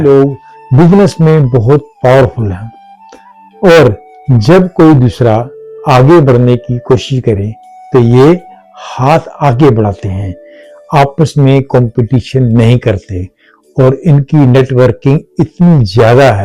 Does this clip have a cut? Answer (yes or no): no